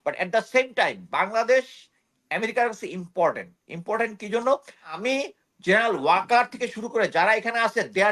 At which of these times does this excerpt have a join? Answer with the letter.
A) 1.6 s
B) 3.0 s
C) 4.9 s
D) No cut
C